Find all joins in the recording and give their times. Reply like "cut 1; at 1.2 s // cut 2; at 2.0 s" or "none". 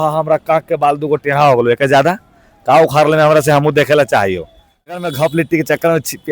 cut 1; at 4.9 s